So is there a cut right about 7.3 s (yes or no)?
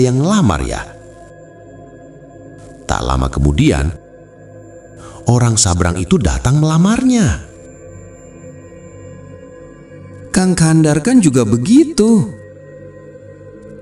no